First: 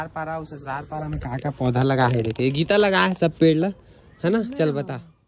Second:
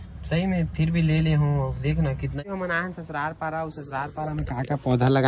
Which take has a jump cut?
second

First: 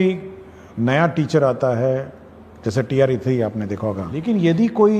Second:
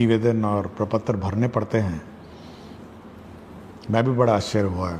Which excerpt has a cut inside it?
first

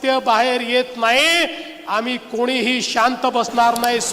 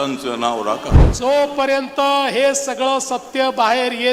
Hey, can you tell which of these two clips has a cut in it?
second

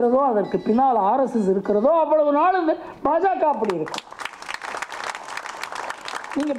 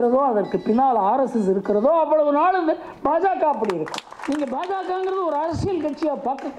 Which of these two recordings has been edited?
second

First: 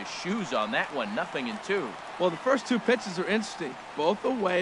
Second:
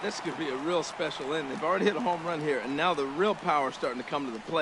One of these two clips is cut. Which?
first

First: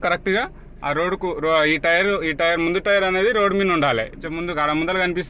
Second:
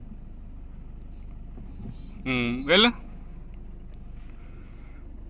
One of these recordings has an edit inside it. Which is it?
first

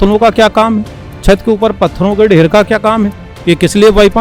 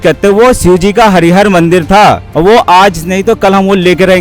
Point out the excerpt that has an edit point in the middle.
second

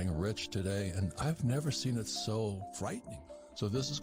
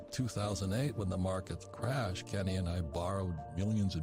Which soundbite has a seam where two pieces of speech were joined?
first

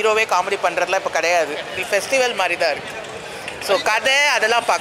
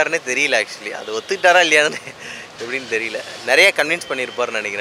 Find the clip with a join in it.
first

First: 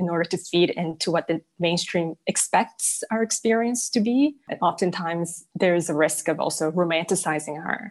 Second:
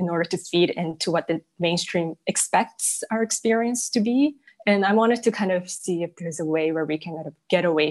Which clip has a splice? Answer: second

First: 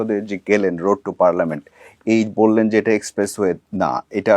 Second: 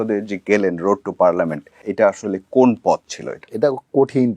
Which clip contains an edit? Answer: second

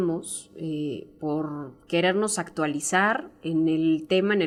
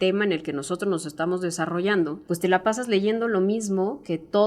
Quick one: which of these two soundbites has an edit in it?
second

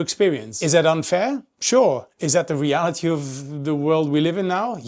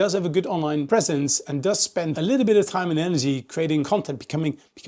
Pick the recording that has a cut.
second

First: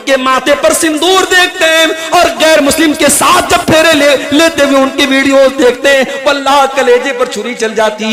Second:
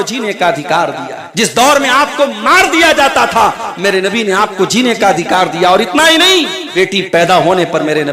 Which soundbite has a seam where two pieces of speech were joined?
second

